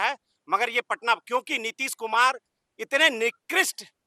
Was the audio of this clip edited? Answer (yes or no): no